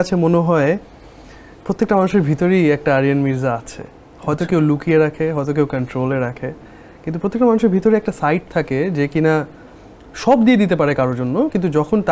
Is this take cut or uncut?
uncut